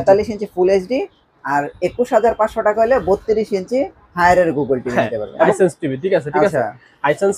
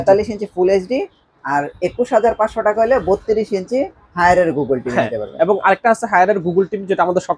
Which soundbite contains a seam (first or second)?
first